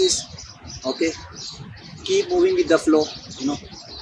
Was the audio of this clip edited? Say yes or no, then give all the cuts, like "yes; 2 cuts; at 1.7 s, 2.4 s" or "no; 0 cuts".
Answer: no; 0 cuts